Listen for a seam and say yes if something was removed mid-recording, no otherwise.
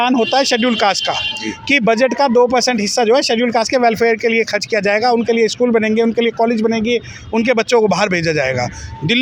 no